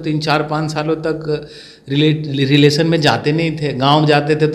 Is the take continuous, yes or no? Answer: yes